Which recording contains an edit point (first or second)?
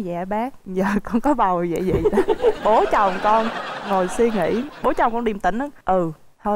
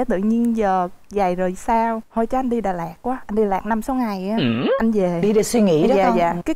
second